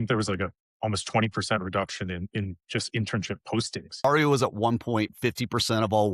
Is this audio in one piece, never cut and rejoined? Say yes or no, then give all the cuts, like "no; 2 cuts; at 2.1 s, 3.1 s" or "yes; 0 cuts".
no; 1 cut; at 4.0 s